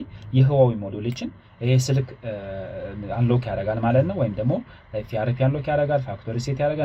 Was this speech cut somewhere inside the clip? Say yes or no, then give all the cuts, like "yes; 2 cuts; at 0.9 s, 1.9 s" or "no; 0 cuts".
no; 0 cuts